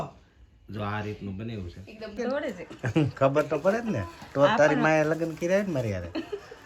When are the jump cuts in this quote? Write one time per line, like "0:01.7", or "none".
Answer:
0:02.2